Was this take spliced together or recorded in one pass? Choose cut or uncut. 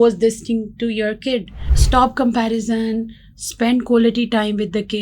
cut